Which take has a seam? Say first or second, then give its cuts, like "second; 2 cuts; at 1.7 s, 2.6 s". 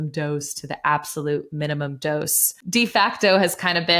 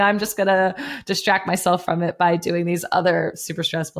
first; 1 cut; at 2.6 s